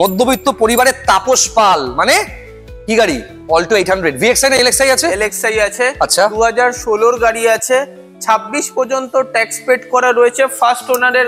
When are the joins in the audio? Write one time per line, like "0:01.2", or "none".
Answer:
none